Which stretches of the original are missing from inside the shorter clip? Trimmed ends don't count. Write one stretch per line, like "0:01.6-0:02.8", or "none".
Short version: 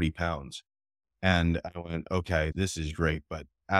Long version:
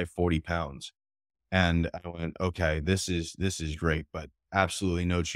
0:02.8-0:03.3

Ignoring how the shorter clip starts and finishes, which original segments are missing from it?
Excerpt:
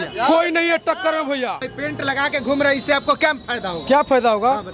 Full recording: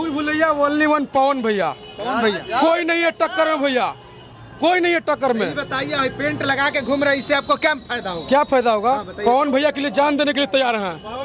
0:04.1-0:06.2

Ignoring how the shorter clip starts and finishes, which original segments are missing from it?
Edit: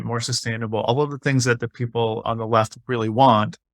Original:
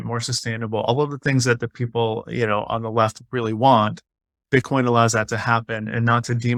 0:02.2-0:02.7

